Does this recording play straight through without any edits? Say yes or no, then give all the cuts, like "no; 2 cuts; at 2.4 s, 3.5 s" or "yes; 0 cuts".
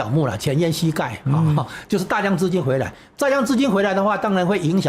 yes; 0 cuts